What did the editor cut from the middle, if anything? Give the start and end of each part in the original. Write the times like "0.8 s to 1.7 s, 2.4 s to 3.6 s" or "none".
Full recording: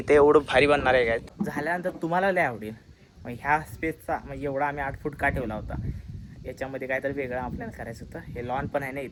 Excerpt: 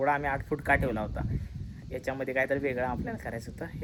none